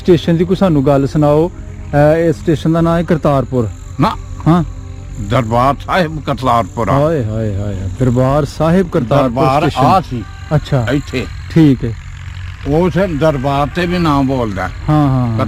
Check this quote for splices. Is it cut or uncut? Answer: uncut